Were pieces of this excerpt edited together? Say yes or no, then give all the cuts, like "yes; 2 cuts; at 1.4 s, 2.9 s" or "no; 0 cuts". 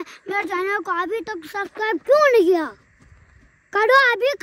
no; 0 cuts